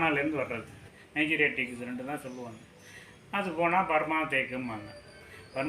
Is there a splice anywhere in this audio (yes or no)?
yes